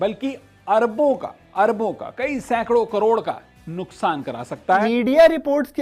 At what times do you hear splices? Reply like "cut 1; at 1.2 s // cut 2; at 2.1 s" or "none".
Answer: cut 1; at 4.8 s